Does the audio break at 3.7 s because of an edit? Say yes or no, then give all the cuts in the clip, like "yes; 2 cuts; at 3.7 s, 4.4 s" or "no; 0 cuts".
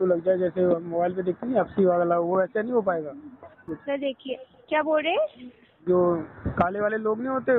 yes; 1 cut; at 3.7 s